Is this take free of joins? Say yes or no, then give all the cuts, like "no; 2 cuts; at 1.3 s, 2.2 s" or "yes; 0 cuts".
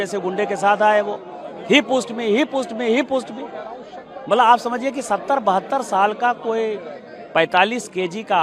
yes; 0 cuts